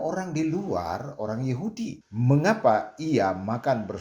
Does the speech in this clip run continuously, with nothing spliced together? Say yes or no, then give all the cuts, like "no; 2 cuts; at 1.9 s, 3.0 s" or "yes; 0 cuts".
no; 1 cut; at 2.0 s